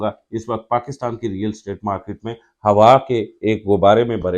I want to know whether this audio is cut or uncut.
uncut